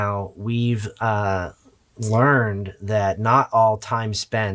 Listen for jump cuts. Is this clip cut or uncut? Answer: uncut